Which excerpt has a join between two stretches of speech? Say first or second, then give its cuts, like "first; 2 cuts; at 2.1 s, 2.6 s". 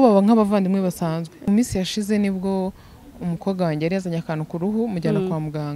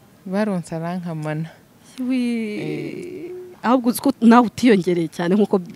first; 1 cut; at 1.5 s